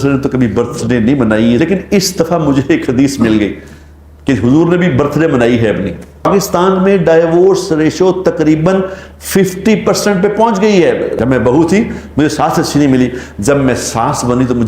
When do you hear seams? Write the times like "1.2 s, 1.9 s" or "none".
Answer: 1.6 s, 6.3 s, 11.1 s